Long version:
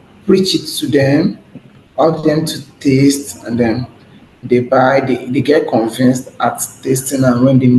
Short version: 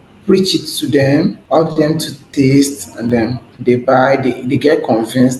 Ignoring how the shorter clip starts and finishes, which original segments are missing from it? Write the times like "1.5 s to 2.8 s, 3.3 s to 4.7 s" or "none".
2.0 s to 2.4 s, 3.7 s to 4.0 s